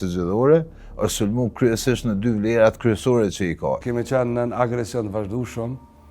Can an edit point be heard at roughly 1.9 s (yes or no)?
no